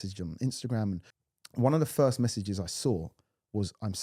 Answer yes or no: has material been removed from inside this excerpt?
yes